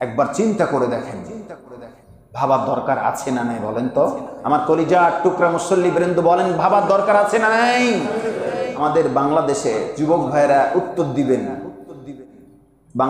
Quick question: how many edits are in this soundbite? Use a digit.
1